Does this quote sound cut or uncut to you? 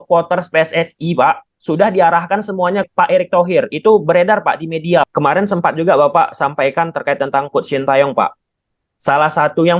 cut